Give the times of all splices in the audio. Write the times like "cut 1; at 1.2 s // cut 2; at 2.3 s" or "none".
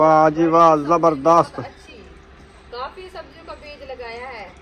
cut 1; at 1.9 s